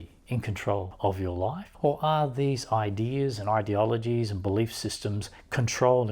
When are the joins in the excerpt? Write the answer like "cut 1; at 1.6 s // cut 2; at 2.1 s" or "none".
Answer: cut 1; at 0.9 s // cut 2; at 1.7 s